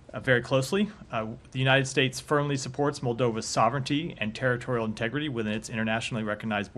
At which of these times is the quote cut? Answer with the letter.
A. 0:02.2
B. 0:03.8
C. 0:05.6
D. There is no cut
B